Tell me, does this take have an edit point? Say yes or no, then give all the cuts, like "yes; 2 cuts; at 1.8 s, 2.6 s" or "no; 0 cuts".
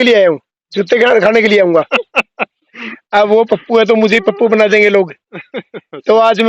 yes; 1 cut; at 1.9 s